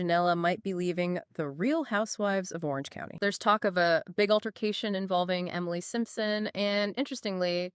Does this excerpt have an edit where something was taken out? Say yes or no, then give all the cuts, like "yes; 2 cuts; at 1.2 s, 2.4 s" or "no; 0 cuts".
yes; 1 cut; at 3.1 s